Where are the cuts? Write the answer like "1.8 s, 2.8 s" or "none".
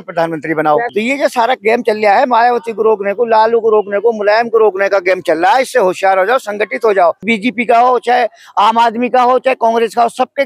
0.9 s, 7.2 s